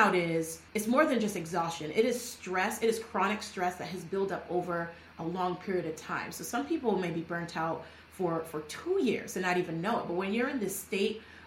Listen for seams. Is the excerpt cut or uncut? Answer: uncut